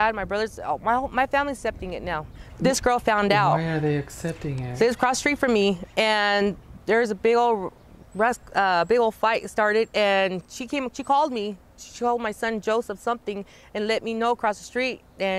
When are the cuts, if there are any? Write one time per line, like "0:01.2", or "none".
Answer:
none